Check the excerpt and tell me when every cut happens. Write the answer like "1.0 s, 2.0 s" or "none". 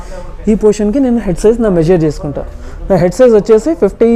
none